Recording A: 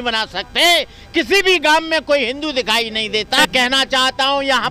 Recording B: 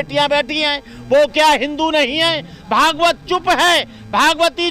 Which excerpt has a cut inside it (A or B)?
A